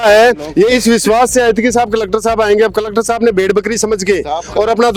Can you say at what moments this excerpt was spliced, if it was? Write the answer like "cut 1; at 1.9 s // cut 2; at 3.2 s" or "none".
none